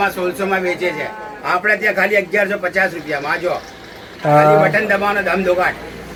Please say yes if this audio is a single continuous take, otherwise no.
yes